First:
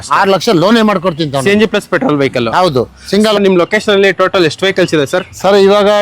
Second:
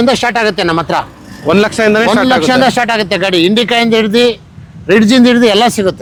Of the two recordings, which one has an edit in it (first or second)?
first